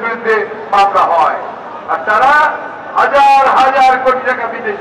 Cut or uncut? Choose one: uncut